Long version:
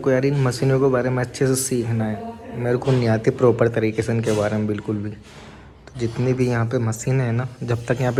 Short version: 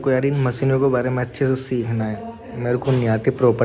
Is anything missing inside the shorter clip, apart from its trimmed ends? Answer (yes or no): no